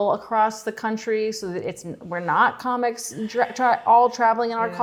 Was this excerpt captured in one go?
yes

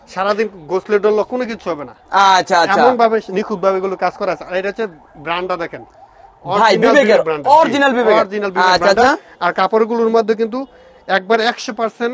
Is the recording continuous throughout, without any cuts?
yes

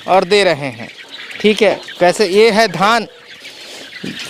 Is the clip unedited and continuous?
yes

